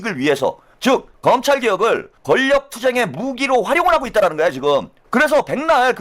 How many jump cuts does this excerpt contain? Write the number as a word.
three